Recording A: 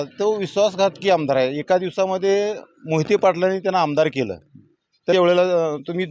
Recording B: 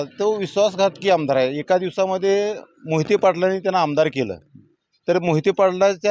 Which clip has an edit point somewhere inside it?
A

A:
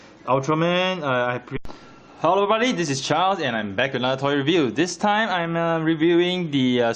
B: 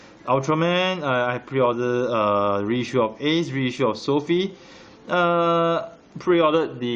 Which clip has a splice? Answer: B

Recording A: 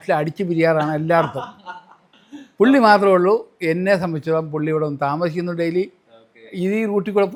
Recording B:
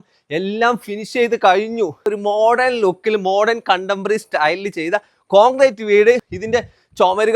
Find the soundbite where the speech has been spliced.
B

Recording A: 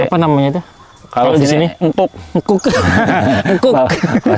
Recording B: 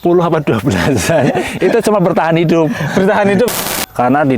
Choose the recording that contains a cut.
B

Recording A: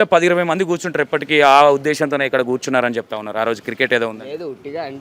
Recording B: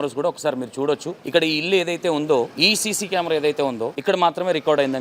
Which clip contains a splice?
B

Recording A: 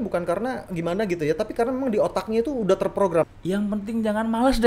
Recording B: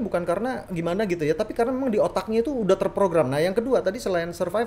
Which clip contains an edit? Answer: A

